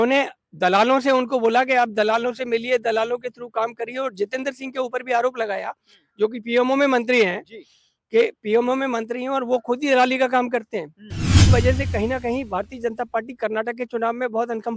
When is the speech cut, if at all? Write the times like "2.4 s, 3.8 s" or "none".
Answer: 11.4 s